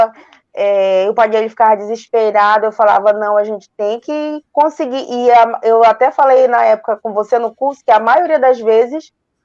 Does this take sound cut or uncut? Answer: uncut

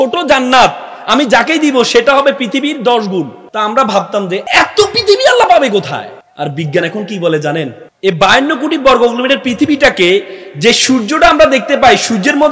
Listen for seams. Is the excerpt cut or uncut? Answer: cut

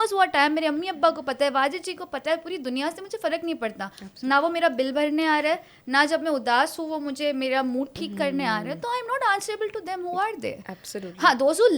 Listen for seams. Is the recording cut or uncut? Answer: uncut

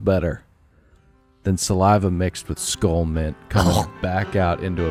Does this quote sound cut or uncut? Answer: uncut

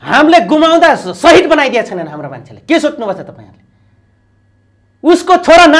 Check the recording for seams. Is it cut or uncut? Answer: uncut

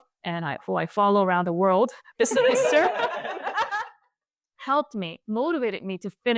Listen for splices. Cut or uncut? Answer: uncut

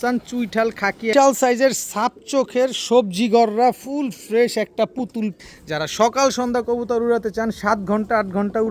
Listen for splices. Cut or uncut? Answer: cut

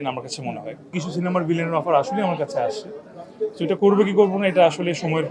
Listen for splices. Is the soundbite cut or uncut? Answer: cut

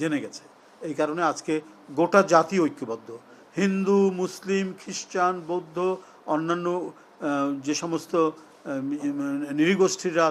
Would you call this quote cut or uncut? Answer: uncut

